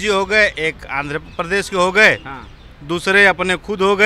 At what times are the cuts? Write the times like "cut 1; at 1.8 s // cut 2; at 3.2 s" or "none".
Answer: none